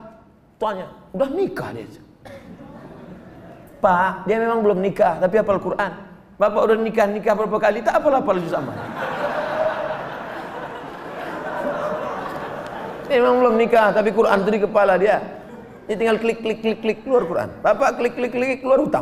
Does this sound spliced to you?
no; 0 cuts

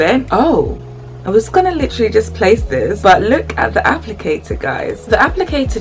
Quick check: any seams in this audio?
no; 0 cuts

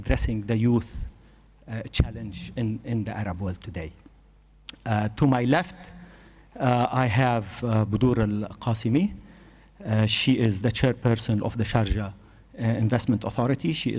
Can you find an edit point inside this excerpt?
yes; 1 cut; at 10.2 s

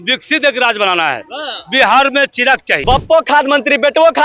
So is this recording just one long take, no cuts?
no; 1 cut; at 2.7 s

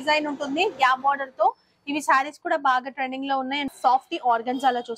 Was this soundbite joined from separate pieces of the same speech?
yes; 1 cut; at 3.7 s

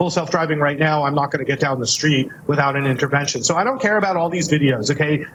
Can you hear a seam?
no; 0 cuts

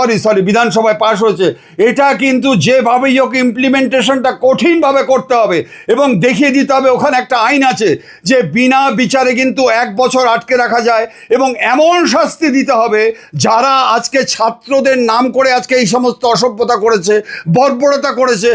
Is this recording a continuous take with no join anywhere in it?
yes; 0 cuts

